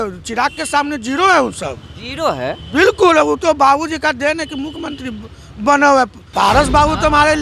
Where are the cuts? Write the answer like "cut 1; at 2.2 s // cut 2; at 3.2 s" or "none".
cut 1; at 6.2 s